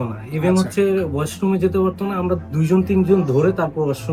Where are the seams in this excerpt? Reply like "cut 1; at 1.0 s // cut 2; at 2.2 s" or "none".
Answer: none